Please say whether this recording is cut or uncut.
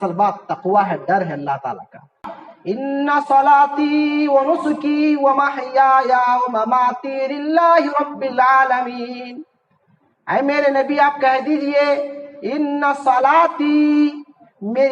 cut